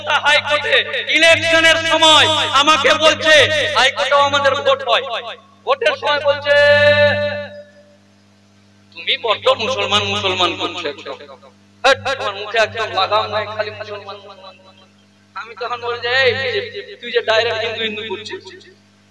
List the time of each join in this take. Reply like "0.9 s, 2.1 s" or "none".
none

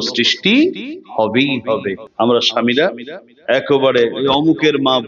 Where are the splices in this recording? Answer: 2.0 s

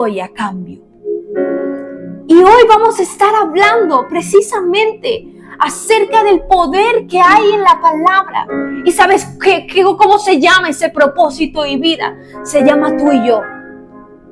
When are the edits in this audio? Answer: 8.6 s

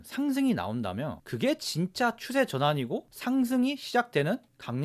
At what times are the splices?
none

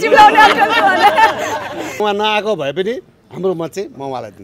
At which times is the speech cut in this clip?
2.0 s

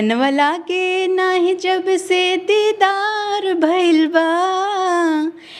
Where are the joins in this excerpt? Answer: none

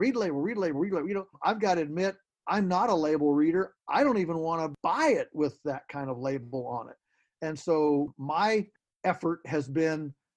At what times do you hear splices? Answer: none

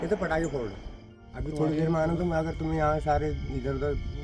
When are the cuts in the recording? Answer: 1.1 s

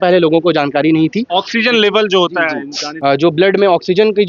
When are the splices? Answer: 2.8 s

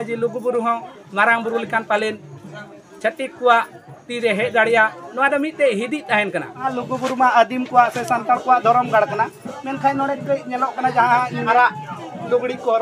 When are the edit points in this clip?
6.7 s, 11.4 s

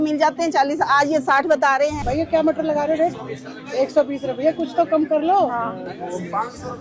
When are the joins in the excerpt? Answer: 2.0 s

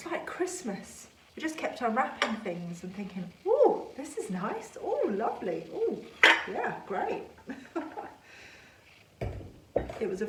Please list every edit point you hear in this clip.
none

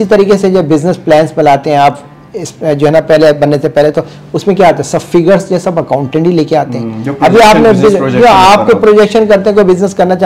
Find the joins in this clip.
none

